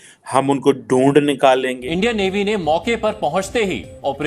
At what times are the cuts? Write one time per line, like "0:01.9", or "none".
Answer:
0:01.8